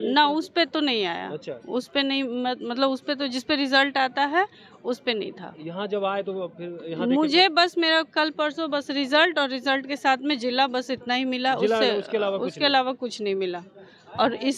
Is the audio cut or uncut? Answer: uncut